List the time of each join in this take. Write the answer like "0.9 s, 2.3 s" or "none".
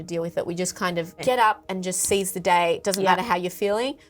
1.2 s